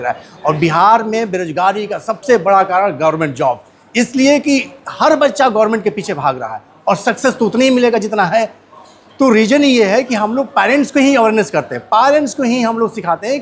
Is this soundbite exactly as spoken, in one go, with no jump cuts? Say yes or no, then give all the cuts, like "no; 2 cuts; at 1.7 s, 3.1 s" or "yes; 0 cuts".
yes; 0 cuts